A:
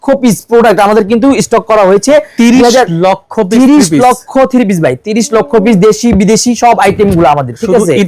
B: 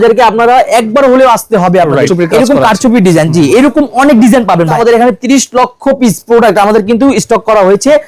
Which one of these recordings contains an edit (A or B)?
B